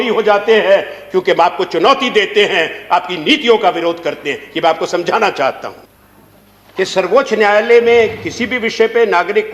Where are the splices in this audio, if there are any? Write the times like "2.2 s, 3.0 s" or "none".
none